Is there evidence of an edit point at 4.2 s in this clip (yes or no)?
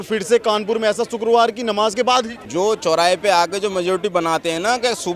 no